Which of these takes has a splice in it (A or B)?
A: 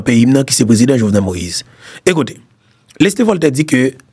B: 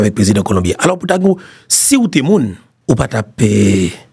B